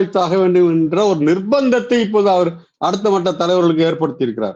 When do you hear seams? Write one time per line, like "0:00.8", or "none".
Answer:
none